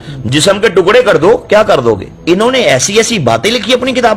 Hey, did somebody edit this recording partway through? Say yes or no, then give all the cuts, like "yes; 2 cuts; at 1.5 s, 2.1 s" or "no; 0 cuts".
yes; 1 cut; at 2.1 s